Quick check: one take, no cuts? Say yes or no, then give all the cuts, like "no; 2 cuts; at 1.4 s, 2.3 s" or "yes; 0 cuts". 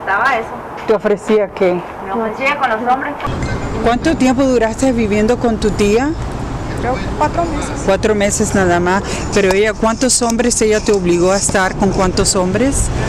yes; 0 cuts